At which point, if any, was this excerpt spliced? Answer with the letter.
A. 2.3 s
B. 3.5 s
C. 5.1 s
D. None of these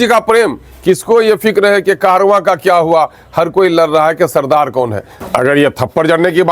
C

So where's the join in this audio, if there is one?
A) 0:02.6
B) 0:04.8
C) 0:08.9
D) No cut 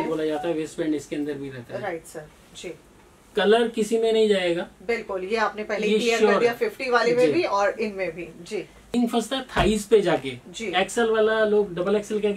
C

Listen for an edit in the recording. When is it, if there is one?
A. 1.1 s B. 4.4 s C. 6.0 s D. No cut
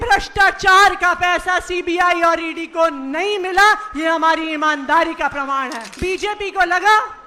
C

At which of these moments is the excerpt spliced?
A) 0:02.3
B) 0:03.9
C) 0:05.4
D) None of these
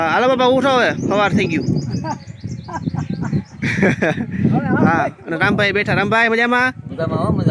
D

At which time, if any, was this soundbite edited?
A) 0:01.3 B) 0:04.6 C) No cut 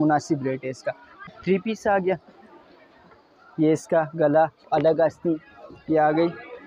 A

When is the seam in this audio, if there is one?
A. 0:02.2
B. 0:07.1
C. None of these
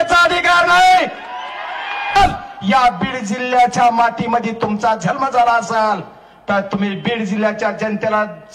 A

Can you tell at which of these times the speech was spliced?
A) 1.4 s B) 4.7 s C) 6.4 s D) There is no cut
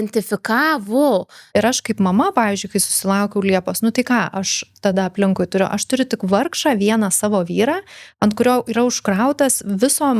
A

